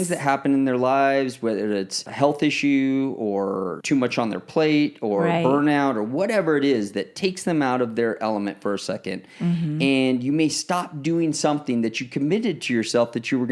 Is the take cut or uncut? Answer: cut